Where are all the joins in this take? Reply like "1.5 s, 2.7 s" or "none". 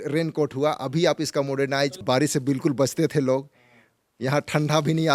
2.0 s